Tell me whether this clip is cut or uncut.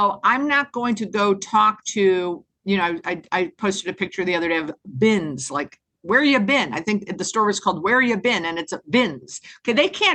uncut